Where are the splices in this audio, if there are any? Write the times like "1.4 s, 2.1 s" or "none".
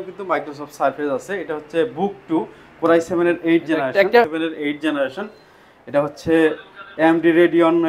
4.3 s